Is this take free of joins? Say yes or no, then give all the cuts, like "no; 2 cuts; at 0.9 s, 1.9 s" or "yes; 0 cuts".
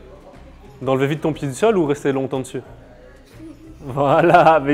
yes; 0 cuts